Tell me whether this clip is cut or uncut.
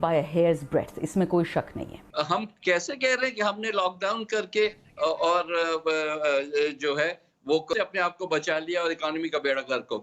cut